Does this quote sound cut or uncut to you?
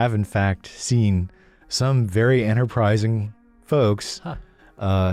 uncut